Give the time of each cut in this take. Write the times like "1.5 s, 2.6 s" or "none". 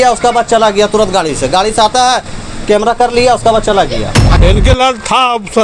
4.2 s